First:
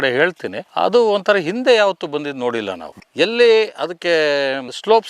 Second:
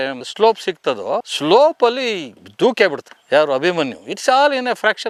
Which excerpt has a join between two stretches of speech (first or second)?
first